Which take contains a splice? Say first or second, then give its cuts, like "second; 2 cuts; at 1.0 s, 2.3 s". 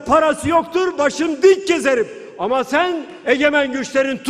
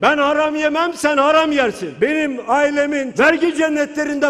second; 2 cuts; at 1.8 s, 3.1 s